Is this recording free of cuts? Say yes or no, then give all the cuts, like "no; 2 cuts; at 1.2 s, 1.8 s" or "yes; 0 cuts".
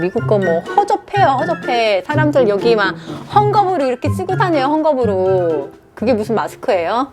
yes; 0 cuts